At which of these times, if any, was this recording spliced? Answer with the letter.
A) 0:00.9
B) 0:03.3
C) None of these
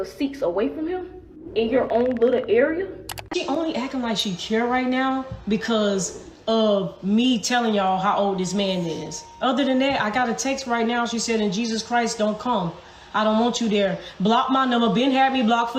B